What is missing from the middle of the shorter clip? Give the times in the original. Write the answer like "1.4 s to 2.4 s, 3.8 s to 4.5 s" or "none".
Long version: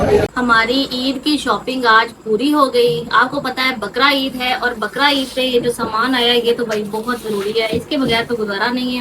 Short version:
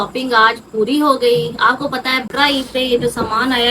3.8 s to 4.9 s